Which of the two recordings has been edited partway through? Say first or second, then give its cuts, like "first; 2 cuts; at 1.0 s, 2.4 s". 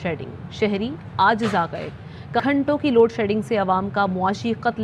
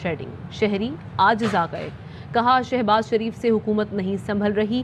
first; 1 cut; at 2.4 s